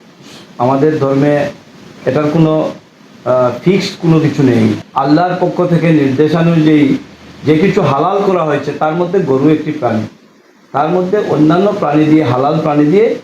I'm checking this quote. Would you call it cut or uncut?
cut